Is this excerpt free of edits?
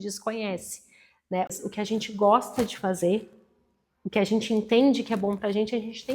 no; 1 cut; at 1.5 s

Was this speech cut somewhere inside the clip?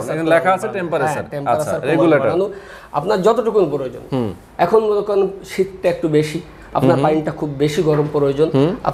no; 0 cuts

